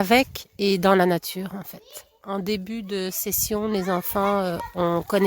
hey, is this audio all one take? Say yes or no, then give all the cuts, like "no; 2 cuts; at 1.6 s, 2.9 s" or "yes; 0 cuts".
no; 1 cut; at 2.1 s